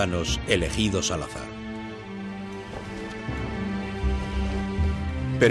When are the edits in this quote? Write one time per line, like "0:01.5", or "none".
0:03.6